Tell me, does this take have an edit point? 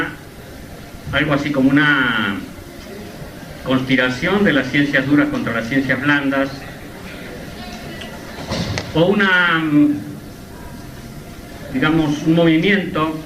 yes; 1 cut; at 9.9 s

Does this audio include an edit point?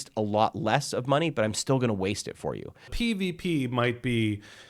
yes; 1 cut; at 2.9 s

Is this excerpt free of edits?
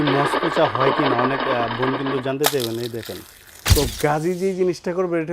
no; 1 cut; at 3.6 s

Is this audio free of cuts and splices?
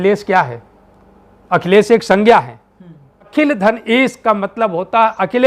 no; 1 cut; at 3.3 s

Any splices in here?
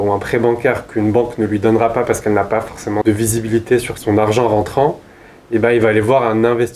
yes; 2 cuts; at 3.0 s, 3.9 s

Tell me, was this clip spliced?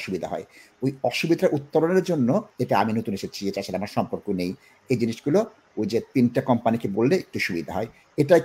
yes; 1 cut; at 2.5 s

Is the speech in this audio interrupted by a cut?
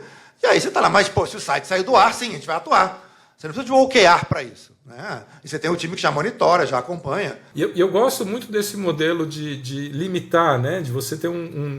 yes; 1 cut; at 7.4 s

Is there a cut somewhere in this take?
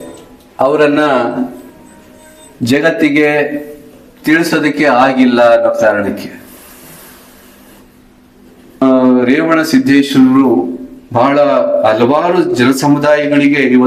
yes; 1 cut; at 8.8 s

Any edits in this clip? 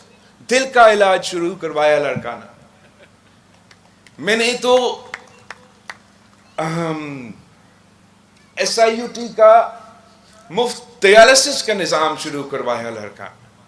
no; 0 cuts

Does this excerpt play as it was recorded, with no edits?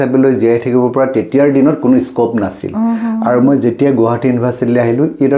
yes; 0 cuts

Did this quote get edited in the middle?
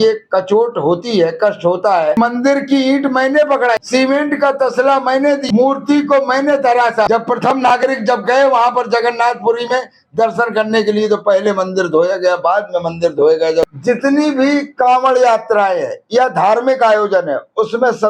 yes; 5 cuts; at 2.2 s, 3.8 s, 5.4 s, 7.1 s, 13.7 s

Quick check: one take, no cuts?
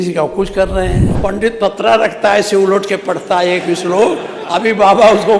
no; 1 cut; at 1.1 s

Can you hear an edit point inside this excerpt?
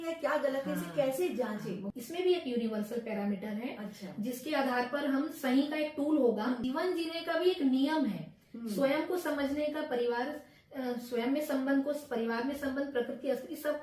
yes; 2 cuts; at 1.9 s, 6.6 s

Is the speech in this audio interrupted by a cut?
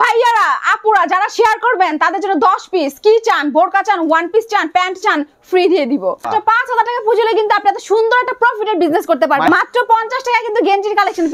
yes; 2 cuts; at 6.2 s, 9.5 s

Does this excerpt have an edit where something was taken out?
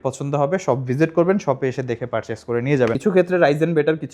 yes; 1 cut; at 3.0 s

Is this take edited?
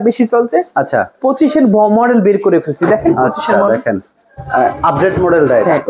no; 0 cuts

